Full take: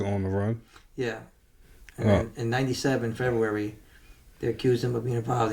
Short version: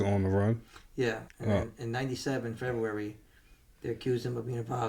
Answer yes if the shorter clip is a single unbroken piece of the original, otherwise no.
no